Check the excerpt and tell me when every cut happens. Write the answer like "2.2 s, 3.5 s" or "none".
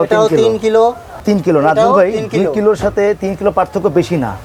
none